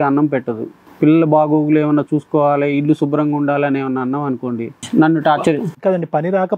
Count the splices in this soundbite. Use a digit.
1